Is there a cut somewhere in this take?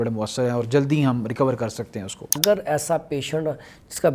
yes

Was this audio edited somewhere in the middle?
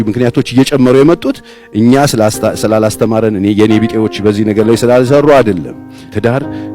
no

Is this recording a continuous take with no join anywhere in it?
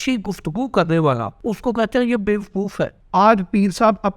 no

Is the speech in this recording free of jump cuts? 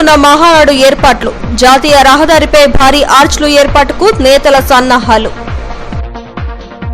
yes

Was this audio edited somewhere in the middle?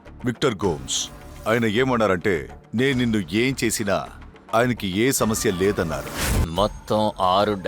yes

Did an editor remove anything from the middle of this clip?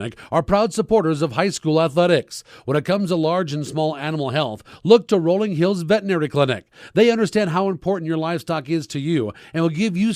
no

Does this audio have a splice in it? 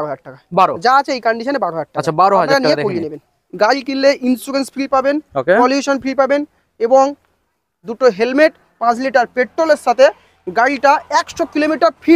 yes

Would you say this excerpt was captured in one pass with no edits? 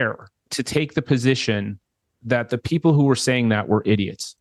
yes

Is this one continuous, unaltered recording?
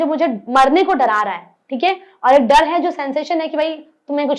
yes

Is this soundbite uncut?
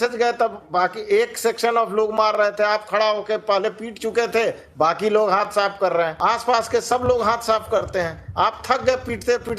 no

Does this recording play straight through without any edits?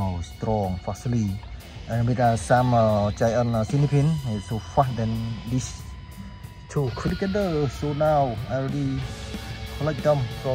no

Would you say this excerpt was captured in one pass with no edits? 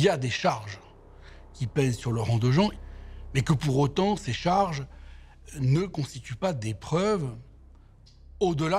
yes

